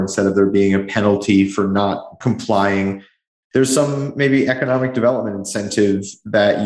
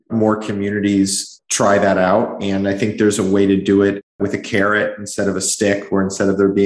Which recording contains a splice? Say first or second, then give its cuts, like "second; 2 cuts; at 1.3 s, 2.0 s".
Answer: second; 1 cut; at 4.1 s